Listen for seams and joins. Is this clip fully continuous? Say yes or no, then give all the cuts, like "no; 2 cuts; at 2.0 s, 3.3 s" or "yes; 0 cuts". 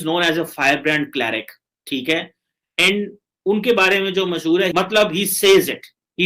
no; 1 cut; at 4.7 s